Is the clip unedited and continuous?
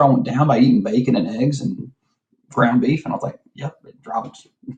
yes; 0 cuts

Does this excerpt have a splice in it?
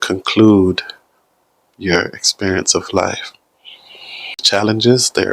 yes; 1 cut; at 4.4 s

